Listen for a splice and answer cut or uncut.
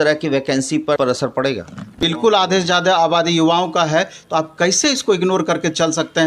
cut